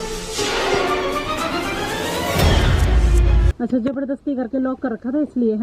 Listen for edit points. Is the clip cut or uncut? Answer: uncut